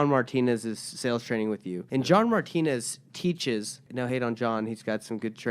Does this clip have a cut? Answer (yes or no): yes